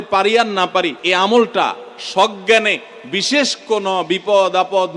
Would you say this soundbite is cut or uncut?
cut